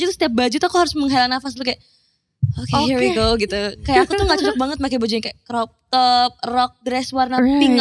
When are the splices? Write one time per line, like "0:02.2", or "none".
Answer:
none